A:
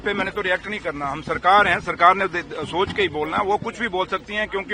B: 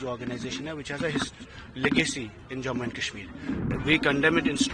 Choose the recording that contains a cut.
B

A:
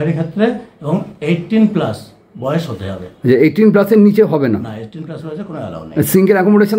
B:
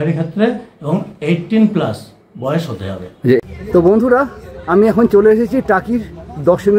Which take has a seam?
B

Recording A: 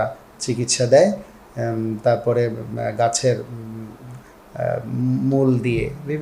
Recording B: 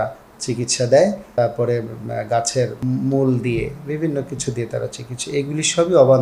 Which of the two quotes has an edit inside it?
B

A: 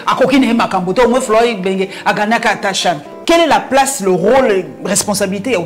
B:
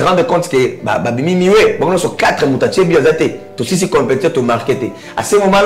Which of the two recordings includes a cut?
A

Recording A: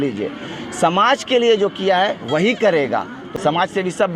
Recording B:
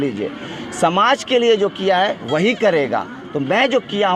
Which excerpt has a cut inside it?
A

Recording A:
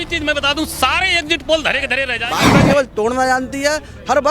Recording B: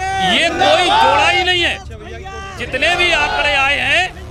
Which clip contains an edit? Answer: A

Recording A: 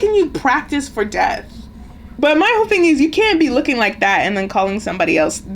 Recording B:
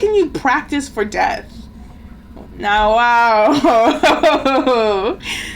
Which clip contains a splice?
A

